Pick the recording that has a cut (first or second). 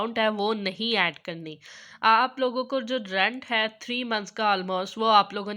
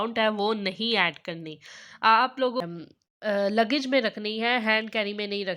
second